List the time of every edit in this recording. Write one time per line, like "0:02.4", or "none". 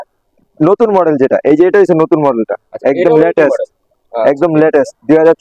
none